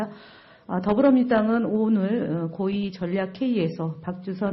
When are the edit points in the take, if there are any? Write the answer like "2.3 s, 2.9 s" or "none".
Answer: none